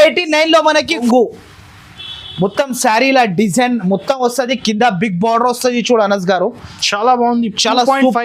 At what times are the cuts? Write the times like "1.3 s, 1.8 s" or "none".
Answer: 1.0 s